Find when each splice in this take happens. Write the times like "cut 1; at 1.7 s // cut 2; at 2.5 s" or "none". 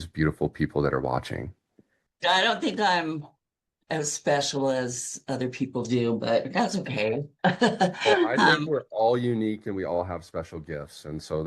cut 1; at 2.0 s